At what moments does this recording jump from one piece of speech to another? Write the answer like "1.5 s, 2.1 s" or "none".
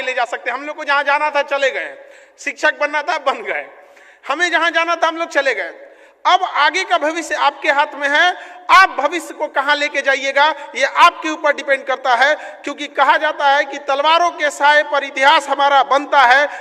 none

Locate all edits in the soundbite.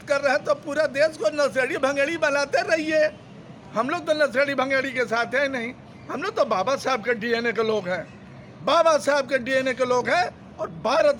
none

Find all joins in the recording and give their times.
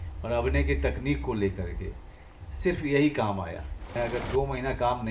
3.8 s

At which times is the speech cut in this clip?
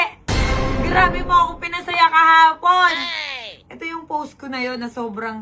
none

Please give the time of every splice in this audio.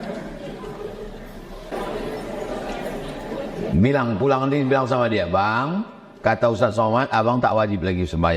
1.7 s

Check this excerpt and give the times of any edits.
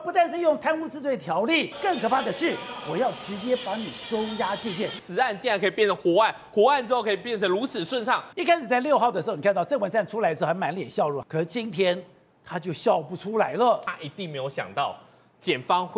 1.7 s, 5.0 s, 8.3 s, 11.2 s, 13.9 s

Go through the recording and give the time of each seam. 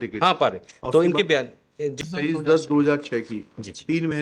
2.0 s

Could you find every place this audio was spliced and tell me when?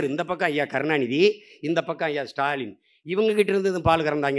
none

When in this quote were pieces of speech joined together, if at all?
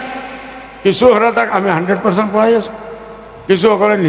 none

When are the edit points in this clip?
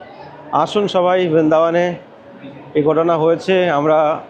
none

